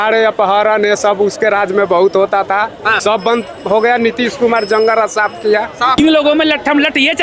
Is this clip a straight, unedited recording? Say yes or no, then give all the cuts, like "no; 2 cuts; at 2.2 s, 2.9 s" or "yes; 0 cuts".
no; 2 cuts; at 2.9 s, 6.0 s